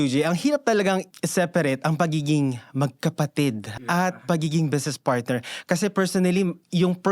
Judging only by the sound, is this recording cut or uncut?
cut